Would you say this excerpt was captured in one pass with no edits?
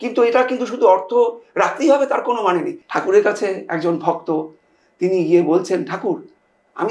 no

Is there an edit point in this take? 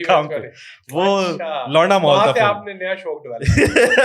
no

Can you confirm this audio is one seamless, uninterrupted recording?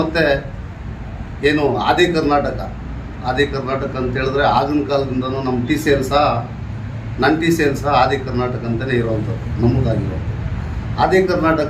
yes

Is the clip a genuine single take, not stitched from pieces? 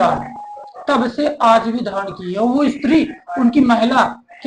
yes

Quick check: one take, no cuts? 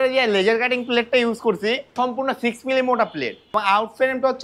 no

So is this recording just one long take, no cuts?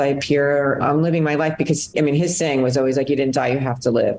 no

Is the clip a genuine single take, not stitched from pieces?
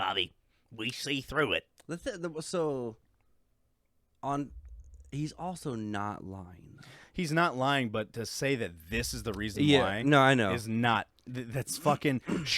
yes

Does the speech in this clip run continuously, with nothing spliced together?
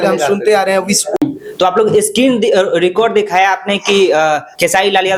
yes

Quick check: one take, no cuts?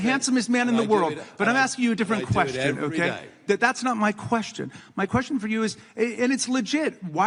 yes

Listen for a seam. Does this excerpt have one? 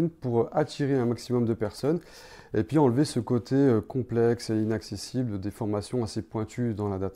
no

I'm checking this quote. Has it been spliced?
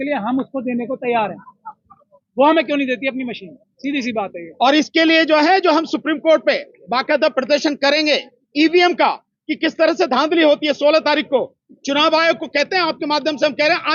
no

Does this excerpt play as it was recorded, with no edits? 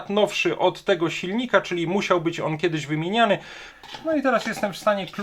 no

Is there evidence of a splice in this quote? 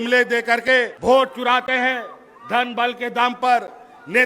yes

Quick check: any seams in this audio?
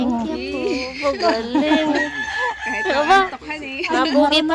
no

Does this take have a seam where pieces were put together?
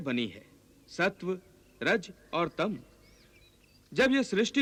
no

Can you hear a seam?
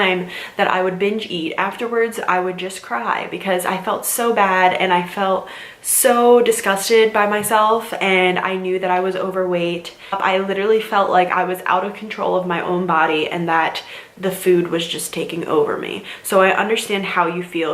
no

